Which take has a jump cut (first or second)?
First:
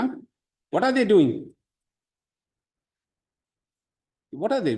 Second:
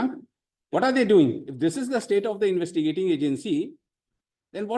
second